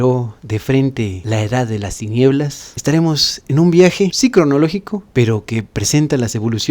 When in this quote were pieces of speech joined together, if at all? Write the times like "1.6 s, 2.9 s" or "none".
1.2 s